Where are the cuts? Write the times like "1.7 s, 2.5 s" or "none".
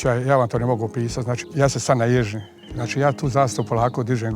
1.3 s